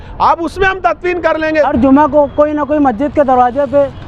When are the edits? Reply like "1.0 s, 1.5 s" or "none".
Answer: 1.7 s